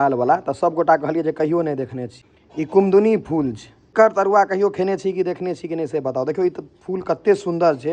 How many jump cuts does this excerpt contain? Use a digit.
2